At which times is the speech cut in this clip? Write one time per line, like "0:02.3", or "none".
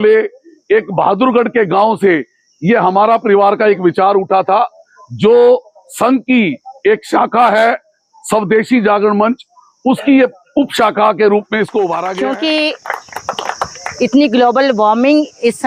0:12.0